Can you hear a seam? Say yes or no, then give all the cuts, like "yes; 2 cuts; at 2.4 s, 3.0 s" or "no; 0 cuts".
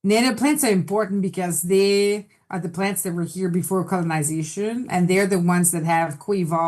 no; 0 cuts